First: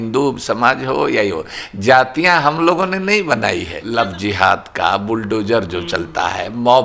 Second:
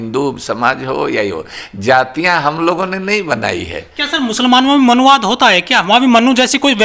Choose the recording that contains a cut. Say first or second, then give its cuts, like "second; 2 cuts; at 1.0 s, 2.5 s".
first; 1 cut; at 3.8 s